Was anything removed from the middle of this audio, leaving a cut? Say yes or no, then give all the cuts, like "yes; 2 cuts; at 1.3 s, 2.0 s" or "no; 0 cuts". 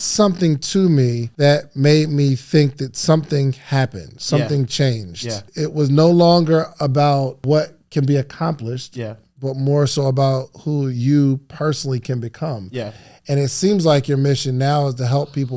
yes; 3 cuts; at 1.2 s, 5.5 s, 7.4 s